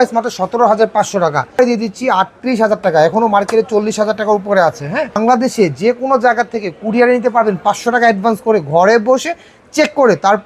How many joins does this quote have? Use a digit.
2